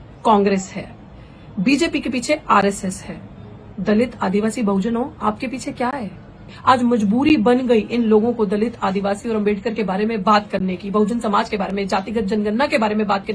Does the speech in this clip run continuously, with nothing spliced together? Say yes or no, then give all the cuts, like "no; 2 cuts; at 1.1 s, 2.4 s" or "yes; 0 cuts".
no; 1 cut; at 6.5 s